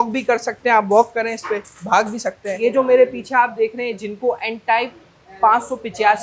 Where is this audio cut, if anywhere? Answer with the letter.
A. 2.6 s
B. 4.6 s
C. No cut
A